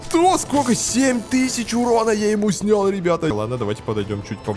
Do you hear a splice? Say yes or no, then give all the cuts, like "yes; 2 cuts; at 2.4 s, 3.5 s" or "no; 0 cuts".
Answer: yes; 1 cut; at 3.3 s